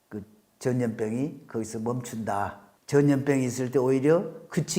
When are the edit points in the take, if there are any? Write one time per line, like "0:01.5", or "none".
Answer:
0:02.7